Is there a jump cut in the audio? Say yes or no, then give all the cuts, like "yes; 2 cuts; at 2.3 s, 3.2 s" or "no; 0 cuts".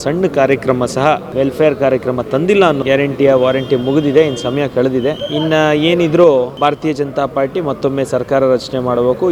yes; 4 cuts; at 1.3 s, 2.8 s, 5.2 s, 6.5 s